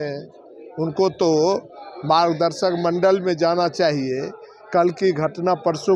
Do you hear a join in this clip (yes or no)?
no